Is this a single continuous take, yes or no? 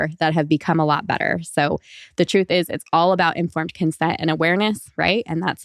yes